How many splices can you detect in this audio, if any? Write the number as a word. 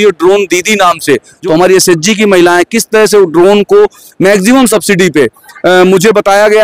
one